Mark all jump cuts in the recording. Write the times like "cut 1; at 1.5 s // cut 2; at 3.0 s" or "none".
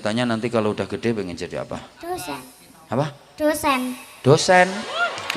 none